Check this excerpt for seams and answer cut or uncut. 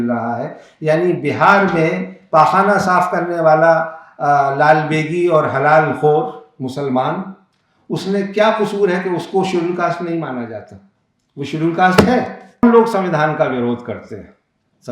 cut